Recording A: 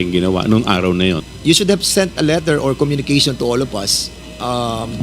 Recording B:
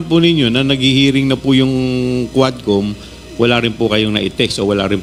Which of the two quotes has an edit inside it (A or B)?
A